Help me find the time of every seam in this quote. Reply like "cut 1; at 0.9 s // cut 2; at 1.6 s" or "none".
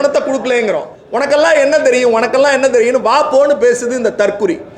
cut 1; at 0.9 s